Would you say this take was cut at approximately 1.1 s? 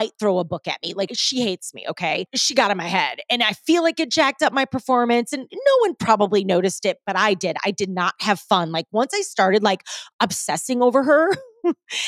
yes; 2 cuts; at 1.1 s, 2.3 s

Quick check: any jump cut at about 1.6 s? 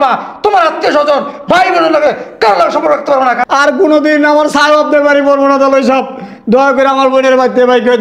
no; 1 cut; at 3.4 s

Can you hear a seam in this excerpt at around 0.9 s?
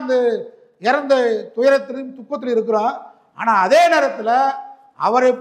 no; 0 cuts

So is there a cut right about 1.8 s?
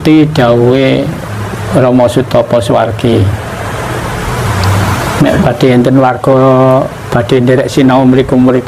no; 1 cut; at 4.0 s

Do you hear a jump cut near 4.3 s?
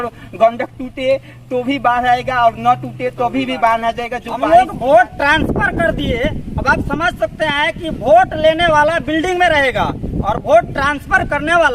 yes; 1 cut; at 4.3 s

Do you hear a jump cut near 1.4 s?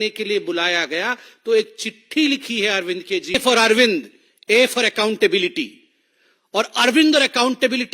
no; 1 cut; at 3.4 s

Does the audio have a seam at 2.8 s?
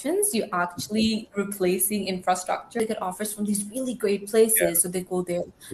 yes; 1 cut; at 2.8 s

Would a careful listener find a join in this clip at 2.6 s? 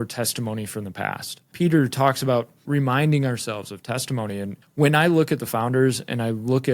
yes; 3 cuts; at 1.5 s, 2.6 s, 4.6 s

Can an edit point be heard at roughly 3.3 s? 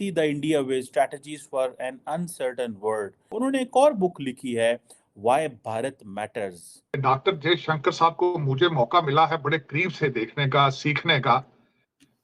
yes; 2 cuts; at 3.3 s, 6.9 s

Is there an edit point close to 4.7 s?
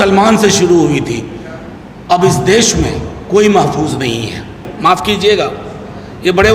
yes; 1 cut; at 4.7 s

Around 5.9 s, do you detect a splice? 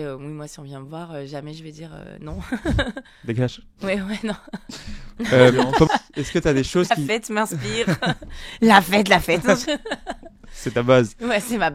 yes; 2 cuts; at 3.1 s, 5.9 s

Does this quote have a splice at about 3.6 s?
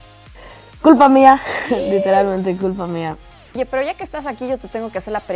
yes; 1 cut; at 3.6 s

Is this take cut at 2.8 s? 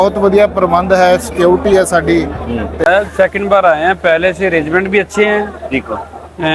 yes; 1 cut; at 2.8 s

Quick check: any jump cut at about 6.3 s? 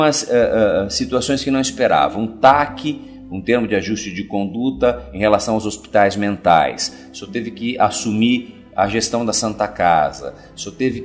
yes; 1 cut; at 6.3 s

